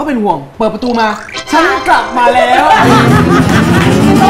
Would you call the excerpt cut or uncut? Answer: uncut